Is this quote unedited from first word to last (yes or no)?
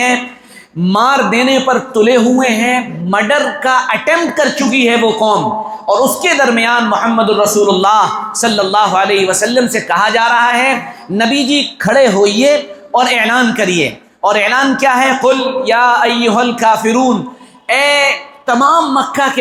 yes